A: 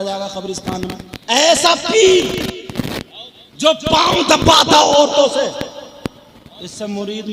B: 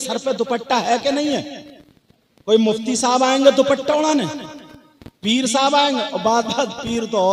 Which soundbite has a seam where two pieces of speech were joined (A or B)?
A